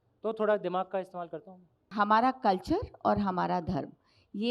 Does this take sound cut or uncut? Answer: cut